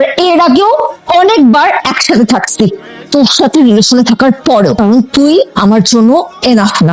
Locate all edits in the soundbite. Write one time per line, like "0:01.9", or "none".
0:04.8

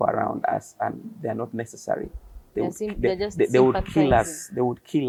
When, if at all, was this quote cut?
none

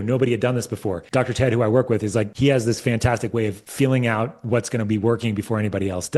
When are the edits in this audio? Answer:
0:01.0
0:02.3
0:03.6

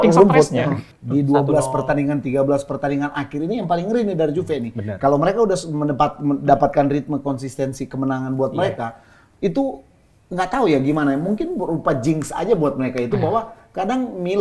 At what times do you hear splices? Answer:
0:00.9

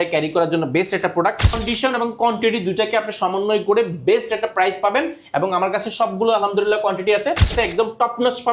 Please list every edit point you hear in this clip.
0:01.6
0:07.5

